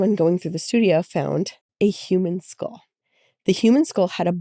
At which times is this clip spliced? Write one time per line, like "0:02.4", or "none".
0:01.6